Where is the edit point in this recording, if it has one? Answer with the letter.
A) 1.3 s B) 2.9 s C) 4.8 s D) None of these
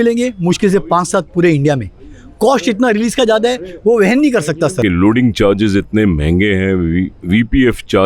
C